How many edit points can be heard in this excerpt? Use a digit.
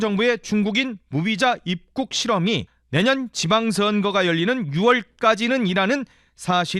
1